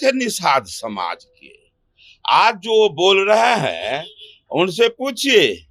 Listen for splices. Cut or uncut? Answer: uncut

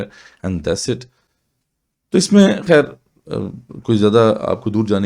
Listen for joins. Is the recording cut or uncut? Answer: uncut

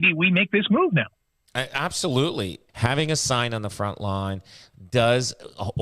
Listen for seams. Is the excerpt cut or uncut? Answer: cut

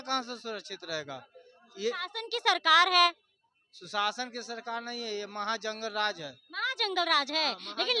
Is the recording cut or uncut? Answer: uncut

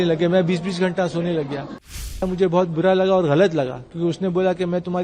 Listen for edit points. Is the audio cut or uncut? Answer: cut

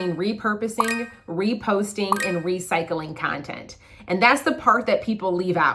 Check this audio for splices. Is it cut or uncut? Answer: uncut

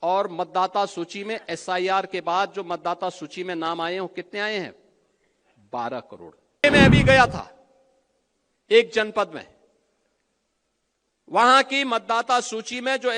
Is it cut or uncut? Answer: cut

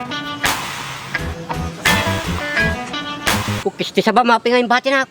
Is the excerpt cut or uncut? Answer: cut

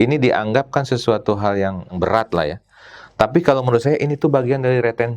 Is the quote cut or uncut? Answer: cut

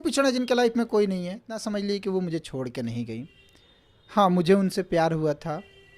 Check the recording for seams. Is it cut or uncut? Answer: cut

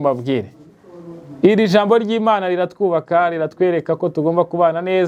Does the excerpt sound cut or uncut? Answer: uncut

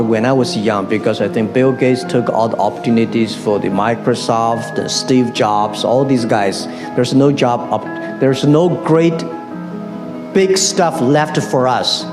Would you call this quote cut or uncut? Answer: uncut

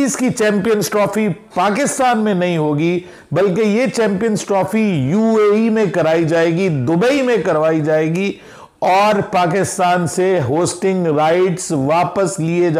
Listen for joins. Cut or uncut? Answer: uncut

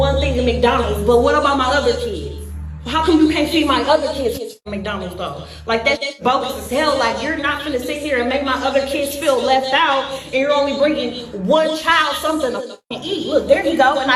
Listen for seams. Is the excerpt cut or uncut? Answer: uncut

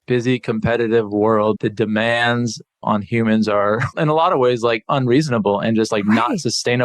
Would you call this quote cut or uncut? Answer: cut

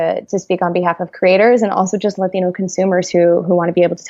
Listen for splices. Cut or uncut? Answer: uncut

